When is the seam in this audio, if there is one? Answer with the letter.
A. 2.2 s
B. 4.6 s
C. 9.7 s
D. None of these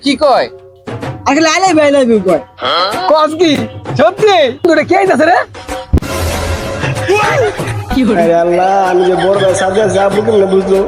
B